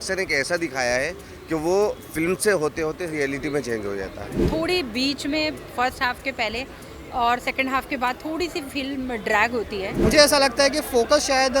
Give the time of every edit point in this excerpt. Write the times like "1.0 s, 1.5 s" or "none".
4.4 s, 10.0 s

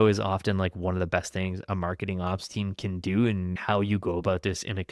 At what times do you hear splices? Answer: 3.6 s

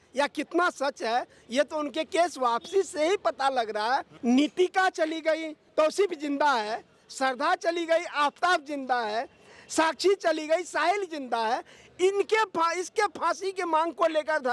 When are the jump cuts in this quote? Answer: 4.1 s, 5.7 s

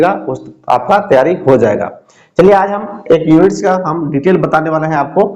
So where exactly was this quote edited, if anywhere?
none

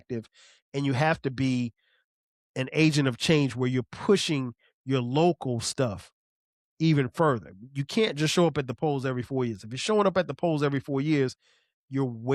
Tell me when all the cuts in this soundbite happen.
none

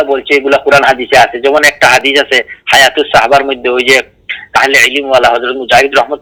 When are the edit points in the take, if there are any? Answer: none

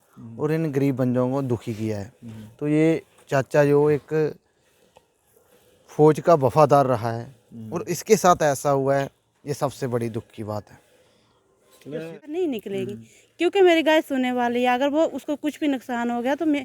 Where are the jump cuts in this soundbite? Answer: 12.1 s

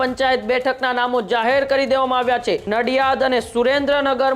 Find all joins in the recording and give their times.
2.6 s

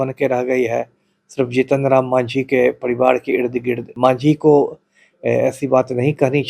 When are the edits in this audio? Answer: 3.9 s

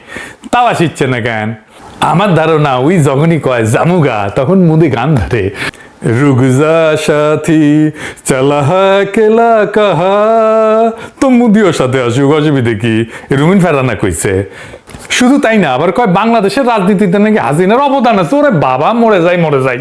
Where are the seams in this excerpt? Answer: 13.2 s

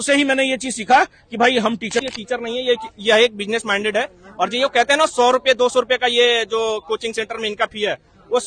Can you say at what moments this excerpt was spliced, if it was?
2.1 s

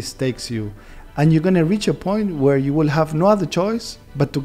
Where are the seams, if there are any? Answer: none

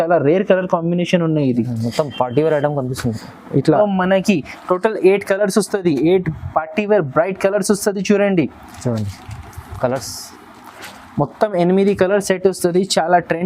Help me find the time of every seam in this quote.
3.8 s

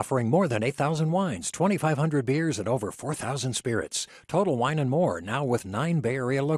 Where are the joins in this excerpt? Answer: none

